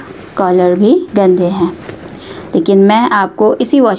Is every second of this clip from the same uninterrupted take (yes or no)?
no